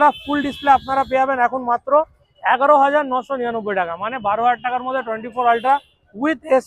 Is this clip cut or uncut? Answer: uncut